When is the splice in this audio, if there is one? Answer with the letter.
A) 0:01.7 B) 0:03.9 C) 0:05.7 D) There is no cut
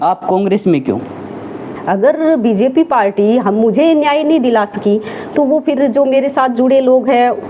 A